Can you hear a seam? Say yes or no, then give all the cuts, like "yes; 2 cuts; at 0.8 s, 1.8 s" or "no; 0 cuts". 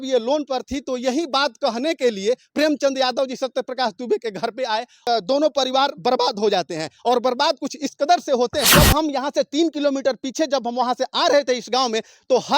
yes; 2 cuts; at 5.1 s, 8.7 s